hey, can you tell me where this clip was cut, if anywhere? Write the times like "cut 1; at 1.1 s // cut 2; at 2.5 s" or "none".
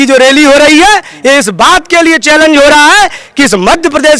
none